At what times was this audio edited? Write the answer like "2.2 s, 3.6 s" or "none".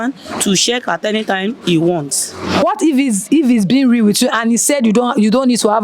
2.6 s